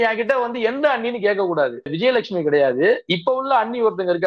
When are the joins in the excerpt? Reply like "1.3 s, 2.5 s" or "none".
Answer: 1.9 s